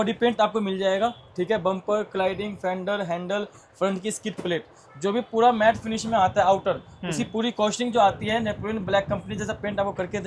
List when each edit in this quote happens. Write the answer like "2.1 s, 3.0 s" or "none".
none